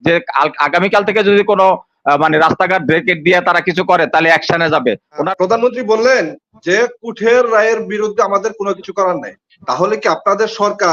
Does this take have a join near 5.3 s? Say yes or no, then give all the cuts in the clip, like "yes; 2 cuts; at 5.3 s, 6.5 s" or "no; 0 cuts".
yes; 1 cut; at 5.3 s